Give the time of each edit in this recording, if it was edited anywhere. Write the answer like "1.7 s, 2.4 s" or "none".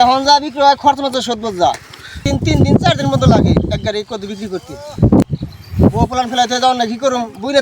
2.3 s, 5.3 s